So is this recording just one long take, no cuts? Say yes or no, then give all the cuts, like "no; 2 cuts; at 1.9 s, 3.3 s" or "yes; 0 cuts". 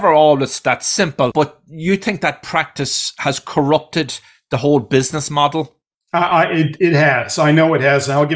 yes; 0 cuts